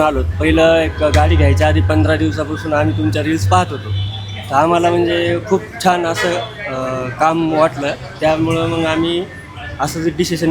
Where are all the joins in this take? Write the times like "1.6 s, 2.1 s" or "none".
none